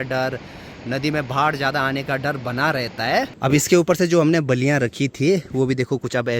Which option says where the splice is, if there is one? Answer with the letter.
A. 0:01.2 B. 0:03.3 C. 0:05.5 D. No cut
B